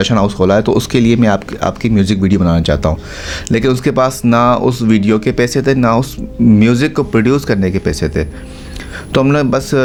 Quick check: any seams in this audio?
no; 0 cuts

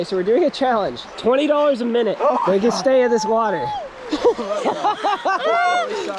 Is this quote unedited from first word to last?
no; 2 cuts; at 1.1 s, 2.2 s

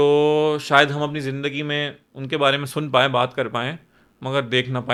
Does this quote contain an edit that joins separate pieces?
no; 0 cuts

